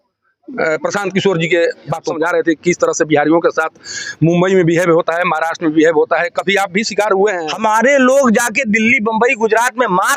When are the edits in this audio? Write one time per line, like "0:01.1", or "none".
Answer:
0:02.1
0:07.4